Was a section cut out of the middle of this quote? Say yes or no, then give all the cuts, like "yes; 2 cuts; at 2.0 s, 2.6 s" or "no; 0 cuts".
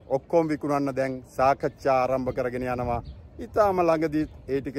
no; 0 cuts